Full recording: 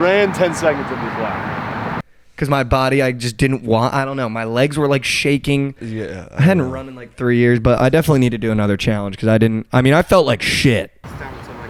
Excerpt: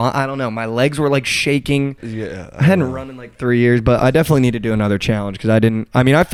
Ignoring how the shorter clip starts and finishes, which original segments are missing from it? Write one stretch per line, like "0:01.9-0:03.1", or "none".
none